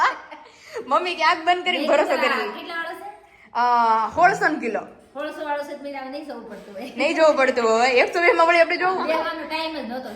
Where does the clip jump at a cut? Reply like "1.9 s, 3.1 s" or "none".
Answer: 9.0 s